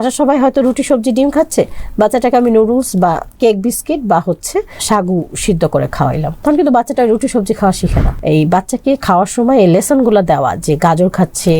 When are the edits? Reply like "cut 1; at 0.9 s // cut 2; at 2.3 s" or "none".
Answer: cut 1; at 3.3 s // cut 2; at 4.8 s // cut 3; at 6.3 s // cut 4; at 8.1 s

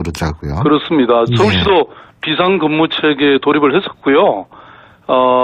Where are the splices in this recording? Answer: cut 1; at 3.3 s

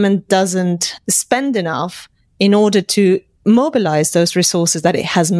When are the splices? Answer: none

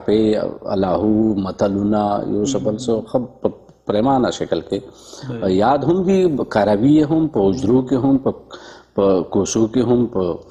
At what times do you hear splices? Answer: none

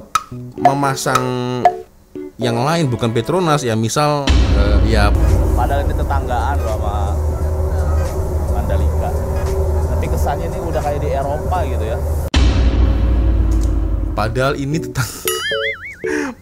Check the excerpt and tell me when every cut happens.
cut 1; at 5.2 s

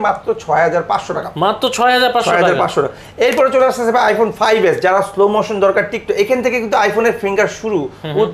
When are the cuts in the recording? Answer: none

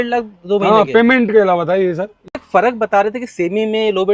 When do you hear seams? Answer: cut 1; at 2.4 s

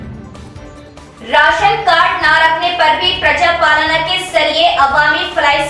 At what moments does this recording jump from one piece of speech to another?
cut 1; at 1.1 s

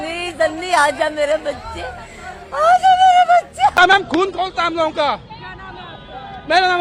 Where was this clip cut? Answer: cut 1; at 3.7 s

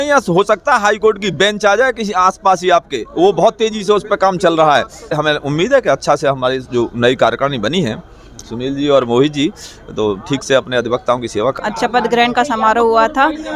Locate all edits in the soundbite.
cut 1; at 5.1 s // cut 2; at 11.6 s

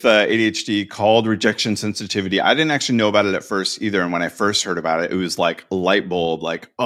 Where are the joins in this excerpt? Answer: none

